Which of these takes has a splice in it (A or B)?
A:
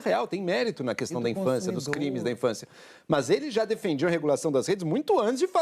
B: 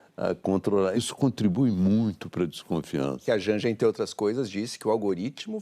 B